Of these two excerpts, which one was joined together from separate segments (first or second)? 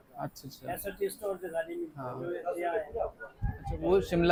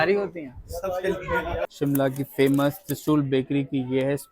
second